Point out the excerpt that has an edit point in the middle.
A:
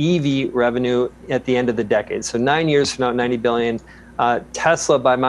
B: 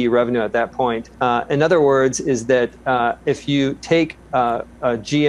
B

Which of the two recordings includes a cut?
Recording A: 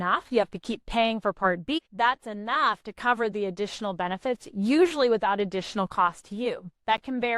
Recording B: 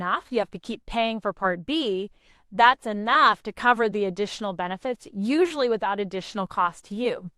A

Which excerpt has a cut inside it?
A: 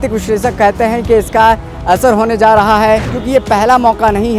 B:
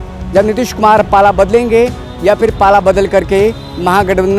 A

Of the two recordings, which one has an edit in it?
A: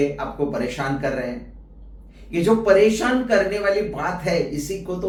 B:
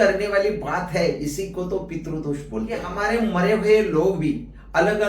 B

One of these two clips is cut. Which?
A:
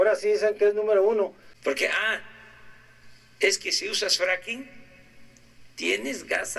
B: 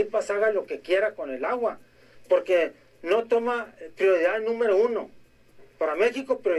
A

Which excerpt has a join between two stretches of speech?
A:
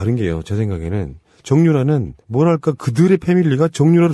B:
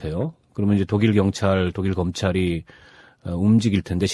B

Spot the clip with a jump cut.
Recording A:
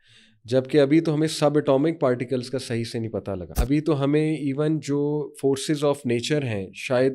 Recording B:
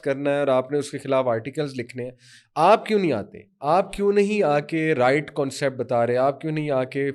A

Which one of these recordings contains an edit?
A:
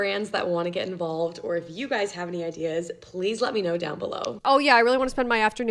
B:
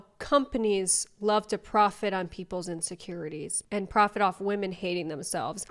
A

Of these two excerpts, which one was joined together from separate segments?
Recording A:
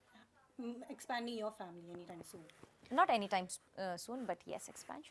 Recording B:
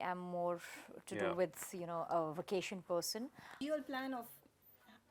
B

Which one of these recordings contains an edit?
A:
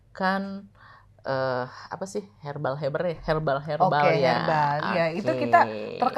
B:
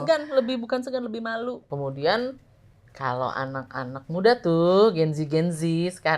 B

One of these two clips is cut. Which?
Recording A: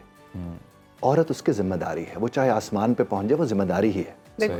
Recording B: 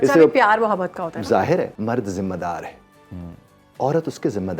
B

